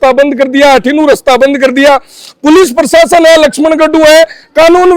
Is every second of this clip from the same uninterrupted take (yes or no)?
yes